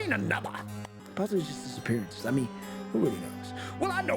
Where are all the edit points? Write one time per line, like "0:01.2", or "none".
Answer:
0:00.9